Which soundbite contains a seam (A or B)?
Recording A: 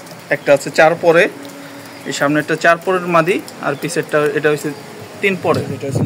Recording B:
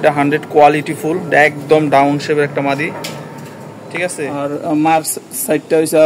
B